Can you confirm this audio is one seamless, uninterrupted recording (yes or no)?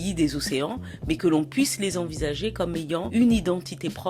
no